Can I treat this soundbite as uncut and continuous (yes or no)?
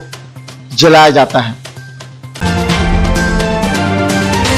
yes